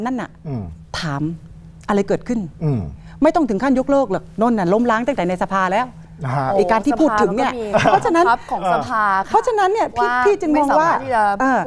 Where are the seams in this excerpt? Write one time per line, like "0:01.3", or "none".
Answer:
none

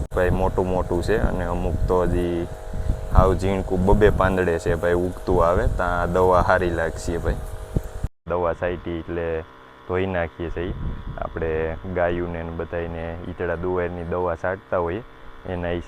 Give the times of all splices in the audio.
0:08.2

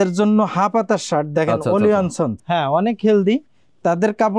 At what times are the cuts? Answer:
0:02.4

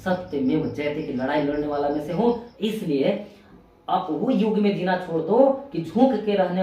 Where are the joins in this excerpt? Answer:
0:02.5

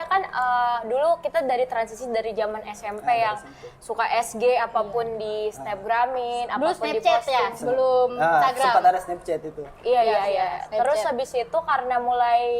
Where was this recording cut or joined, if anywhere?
none

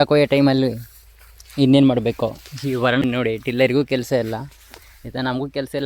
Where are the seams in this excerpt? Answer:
0:03.0

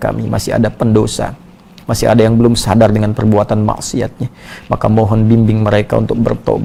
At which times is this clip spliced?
none

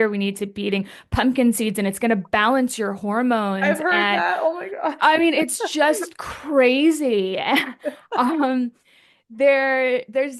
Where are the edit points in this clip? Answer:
none

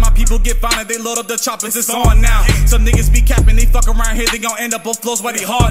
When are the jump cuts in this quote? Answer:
none

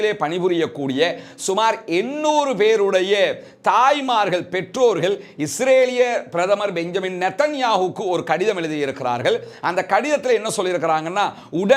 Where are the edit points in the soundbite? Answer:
none

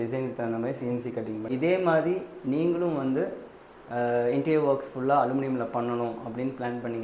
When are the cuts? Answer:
0:01.5

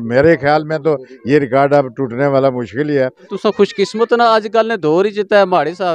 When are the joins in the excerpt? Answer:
0:03.3

